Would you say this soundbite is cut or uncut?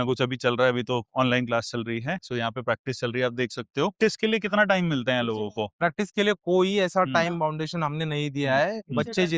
cut